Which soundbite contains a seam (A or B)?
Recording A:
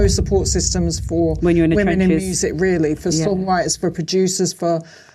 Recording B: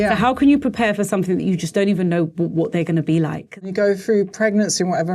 B